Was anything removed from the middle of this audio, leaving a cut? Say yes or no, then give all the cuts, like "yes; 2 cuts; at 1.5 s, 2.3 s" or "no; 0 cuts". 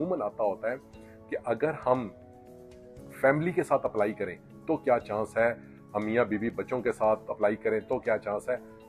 no; 0 cuts